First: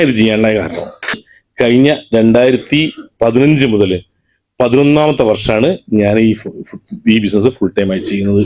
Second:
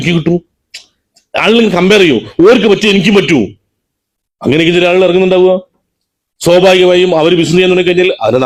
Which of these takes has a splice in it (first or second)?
first